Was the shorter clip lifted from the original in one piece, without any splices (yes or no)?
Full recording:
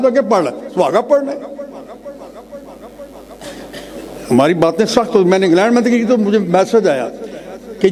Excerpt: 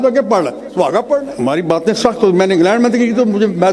no